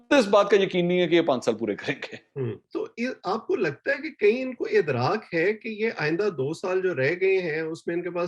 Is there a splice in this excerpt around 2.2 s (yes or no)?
no